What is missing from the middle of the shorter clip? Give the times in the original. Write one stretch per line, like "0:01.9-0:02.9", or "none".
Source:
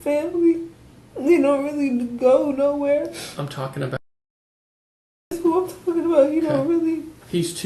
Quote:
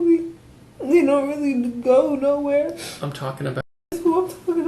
0:04.1-0:05.1